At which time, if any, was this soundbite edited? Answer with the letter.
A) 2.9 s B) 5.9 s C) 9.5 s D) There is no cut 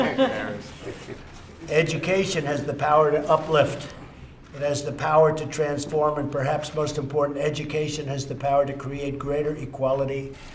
A